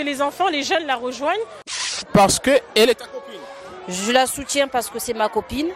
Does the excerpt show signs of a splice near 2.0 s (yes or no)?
yes